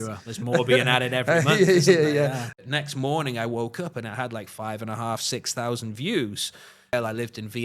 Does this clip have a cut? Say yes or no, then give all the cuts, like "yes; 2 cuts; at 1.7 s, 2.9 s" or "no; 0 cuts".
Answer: yes; 2 cuts; at 2.5 s, 6.9 s